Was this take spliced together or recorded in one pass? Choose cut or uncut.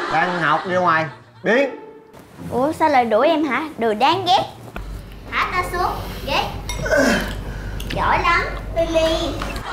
cut